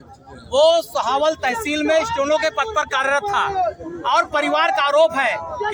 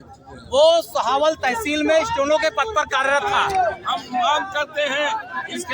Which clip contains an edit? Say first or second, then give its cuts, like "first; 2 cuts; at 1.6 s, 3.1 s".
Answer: second; 1 cut; at 3.8 s